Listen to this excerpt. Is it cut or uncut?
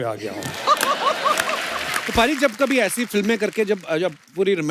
cut